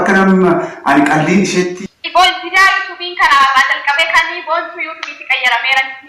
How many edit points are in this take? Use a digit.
1